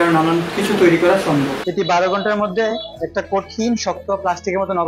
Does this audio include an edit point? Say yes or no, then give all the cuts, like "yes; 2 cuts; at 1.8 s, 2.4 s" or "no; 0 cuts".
yes; 1 cut; at 1.6 s